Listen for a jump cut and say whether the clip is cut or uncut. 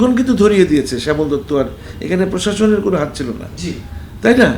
uncut